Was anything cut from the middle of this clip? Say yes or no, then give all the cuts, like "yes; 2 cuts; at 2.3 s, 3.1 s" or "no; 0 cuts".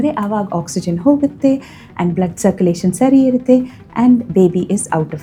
no; 0 cuts